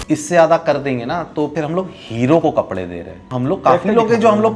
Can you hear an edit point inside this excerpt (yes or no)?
yes